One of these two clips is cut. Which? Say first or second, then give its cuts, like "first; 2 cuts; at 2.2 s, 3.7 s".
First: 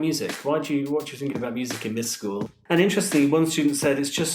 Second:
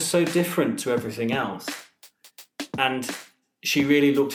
first; 1 cut; at 2.5 s